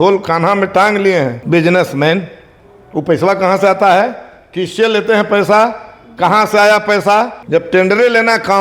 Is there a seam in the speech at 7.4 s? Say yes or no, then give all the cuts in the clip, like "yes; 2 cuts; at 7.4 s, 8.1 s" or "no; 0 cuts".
yes; 2 cuts; at 1.4 s, 7.4 s